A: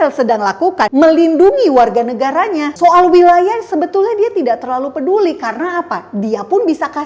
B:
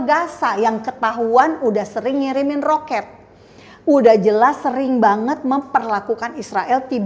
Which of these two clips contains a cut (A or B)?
A